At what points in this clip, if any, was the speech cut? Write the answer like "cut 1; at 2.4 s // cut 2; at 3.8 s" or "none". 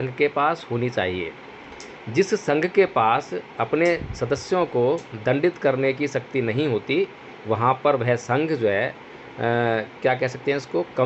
none